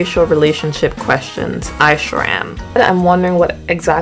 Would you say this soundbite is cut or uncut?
cut